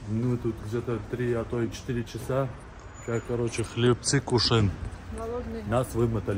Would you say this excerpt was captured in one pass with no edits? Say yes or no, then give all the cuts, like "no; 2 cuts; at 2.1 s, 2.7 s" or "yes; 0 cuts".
yes; 0 cuts